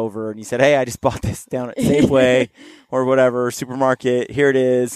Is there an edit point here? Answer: no; 0 cuts

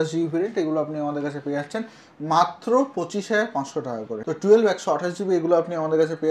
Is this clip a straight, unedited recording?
no; 1 cut; at 4.2 s

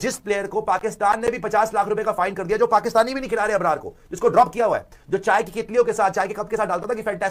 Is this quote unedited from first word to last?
yes; 0 cuts

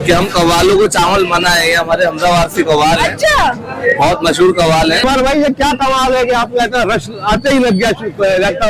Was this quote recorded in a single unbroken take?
no; 1 cut; at 5.0 s

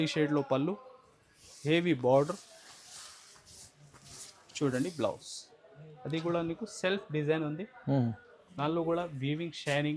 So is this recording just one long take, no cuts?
yes; 0 cuts

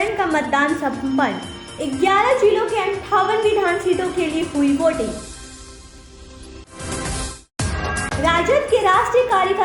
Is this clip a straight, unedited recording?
yes; 0 cuts

